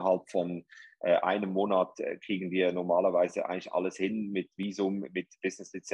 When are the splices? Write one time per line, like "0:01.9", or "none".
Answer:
none